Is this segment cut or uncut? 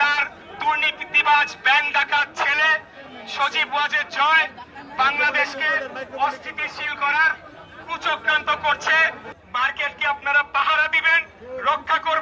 cut